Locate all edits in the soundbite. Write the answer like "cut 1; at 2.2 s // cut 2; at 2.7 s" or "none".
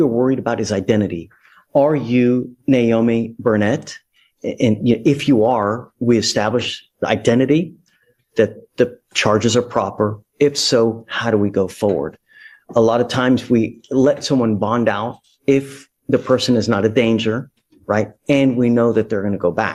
none